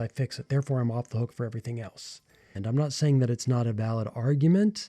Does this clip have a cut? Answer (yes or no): yes